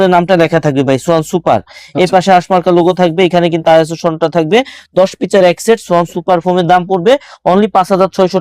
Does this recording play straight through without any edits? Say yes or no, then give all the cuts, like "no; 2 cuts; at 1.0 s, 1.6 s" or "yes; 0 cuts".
yes; 0 cuts